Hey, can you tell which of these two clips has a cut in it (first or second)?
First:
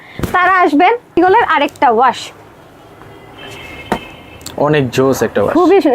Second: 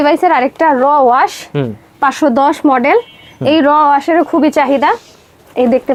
first